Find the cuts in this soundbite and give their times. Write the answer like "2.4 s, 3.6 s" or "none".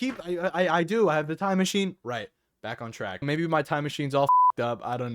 3.2 s